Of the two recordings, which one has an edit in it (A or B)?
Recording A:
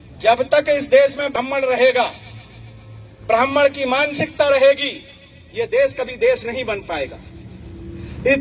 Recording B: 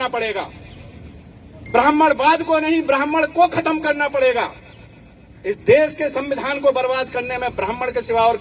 A